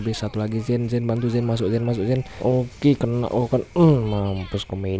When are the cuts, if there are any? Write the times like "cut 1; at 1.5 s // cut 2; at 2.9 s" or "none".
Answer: cut 1; at 2.3 s